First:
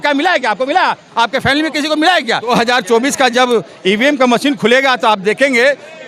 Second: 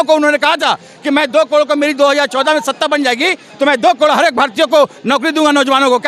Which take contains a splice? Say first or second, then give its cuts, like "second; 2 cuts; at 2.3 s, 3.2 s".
first; 1 cut; at 2.5 s